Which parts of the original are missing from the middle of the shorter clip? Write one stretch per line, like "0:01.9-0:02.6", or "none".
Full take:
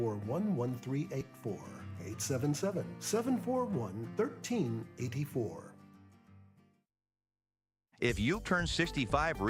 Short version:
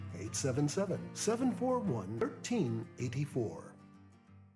0:04.1-0:04.2